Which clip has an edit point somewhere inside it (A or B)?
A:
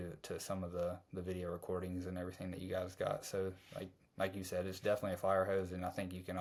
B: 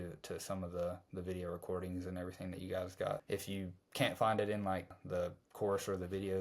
B